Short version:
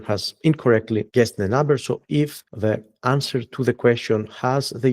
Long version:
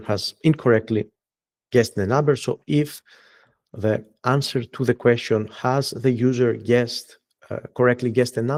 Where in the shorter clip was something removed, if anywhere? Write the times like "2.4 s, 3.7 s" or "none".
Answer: 1.1 s, 2.4 s